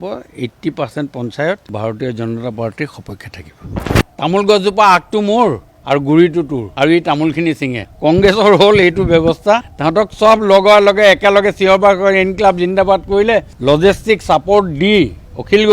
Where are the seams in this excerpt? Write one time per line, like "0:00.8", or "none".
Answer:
0:01.7
0:03.7
0:06.6
0:09.7
0:13.5